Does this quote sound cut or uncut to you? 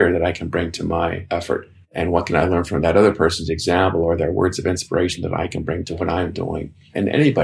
cut